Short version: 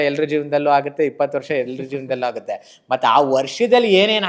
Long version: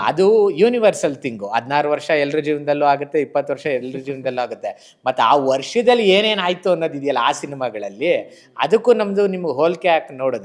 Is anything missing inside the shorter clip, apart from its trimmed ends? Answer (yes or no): no